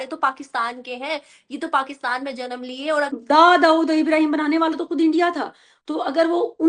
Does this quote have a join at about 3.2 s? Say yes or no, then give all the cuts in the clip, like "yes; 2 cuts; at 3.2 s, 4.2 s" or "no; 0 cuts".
yes; 1 cut; at 3.2 s